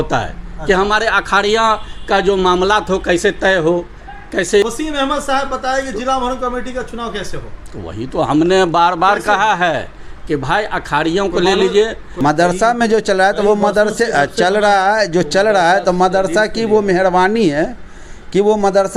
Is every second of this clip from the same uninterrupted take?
no; 2 cuts; at 4.6 s, 12.1 s

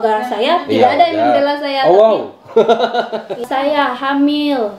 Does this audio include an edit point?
yes; 1 cut; at 3.4 s

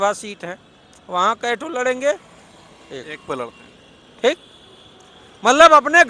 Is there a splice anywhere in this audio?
no; 0 cuts

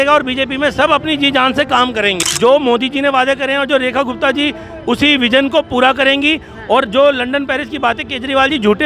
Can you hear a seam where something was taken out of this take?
yes; 1 cut; at 2.2 s

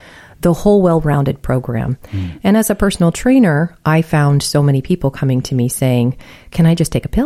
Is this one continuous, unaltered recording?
yes; 0 cuts

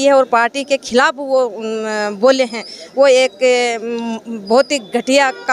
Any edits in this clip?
no; 0 cuts

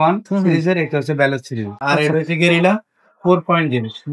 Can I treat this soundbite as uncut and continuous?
no; 1 cut; at 1.8 s

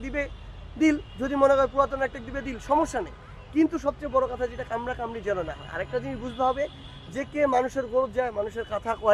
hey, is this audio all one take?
yes; 0 cuts

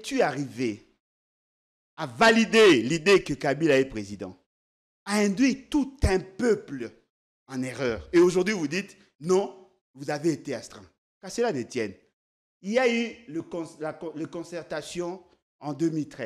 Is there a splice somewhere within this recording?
no; 0 cuts

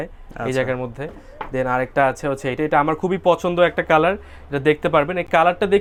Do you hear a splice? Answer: no; 0 cuts

